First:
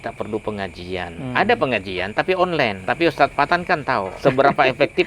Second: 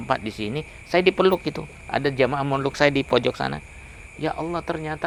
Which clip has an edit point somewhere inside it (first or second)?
first